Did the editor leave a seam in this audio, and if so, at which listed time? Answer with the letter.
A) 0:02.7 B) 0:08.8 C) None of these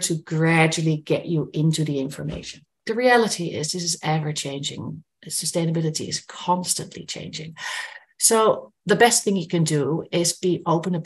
A